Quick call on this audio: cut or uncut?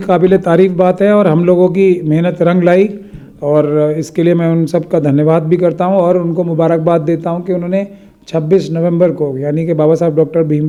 uncut